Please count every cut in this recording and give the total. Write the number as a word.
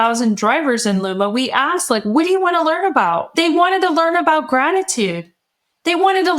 one